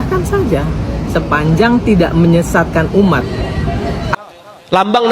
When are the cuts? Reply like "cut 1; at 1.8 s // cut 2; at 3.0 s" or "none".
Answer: cut 1; at 4.0 s